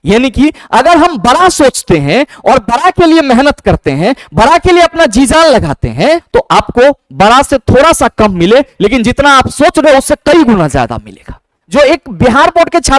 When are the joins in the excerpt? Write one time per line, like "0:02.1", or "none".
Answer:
0:06.2
0:11.6